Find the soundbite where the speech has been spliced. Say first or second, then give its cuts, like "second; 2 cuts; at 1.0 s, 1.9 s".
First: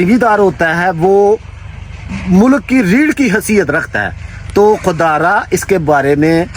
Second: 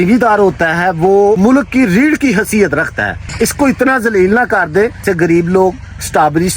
second; 3 cuts; at 1.4 s, 3.3 s, 5.0 s